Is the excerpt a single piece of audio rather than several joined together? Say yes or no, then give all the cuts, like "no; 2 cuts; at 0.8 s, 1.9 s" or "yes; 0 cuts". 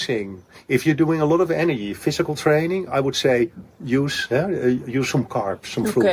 yes; 0 cuts